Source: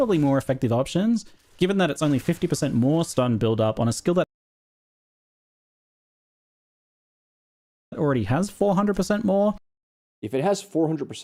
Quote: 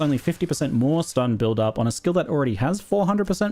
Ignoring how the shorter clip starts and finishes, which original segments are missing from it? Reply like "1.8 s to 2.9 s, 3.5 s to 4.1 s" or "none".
4.3 s to 8.0 s